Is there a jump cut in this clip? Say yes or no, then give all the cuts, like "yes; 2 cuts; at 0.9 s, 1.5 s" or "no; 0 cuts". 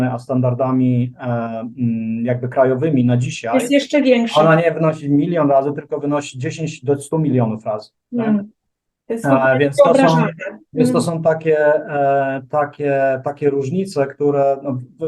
no; 0 cuts